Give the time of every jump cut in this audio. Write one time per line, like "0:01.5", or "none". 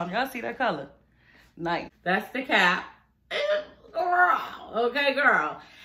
0:01.9

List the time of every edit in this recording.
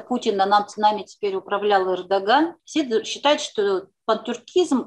0:02.6

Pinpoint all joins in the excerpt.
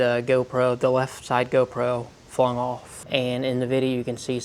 0:02.9

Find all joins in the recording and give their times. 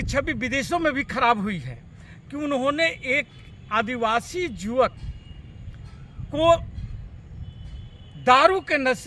none

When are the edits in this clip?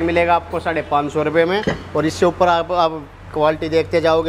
none

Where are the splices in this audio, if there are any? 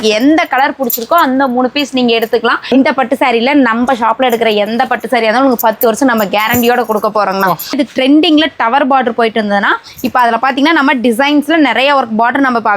0:02.7
0:07.7

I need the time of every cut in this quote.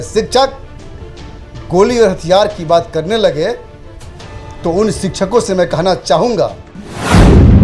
0:06.5

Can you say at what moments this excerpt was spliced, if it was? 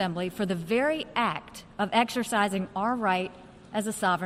none

